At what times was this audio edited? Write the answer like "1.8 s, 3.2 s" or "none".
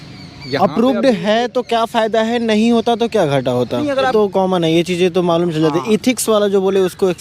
4.1 s